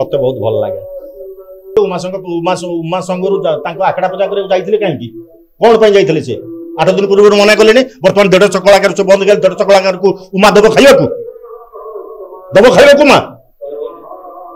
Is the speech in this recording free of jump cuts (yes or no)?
no